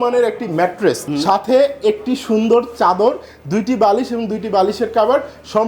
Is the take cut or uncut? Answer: cut